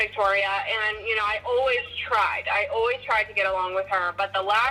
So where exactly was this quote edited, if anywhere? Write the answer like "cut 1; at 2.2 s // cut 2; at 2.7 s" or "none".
none